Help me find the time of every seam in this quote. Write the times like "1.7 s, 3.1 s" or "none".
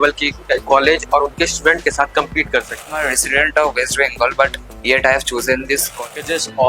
3.0 s, 5.9 s